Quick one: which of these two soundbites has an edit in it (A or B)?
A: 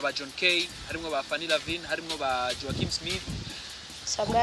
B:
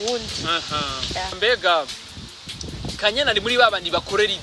B